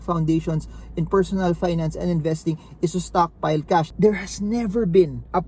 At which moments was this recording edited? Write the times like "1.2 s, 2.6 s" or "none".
3.9 s